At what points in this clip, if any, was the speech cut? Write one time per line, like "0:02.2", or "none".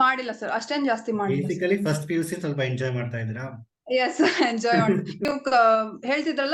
0:05.2